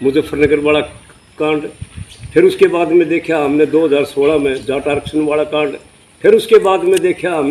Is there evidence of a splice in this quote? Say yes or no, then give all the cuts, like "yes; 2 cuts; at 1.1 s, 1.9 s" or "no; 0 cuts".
no; 0 cuts